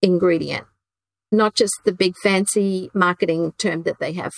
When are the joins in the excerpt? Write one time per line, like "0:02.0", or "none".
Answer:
none